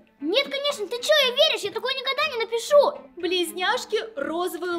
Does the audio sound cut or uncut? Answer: cut